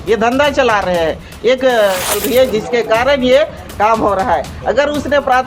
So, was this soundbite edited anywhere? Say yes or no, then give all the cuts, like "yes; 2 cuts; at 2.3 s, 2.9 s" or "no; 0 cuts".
yes; 1 cut; at 2.3 s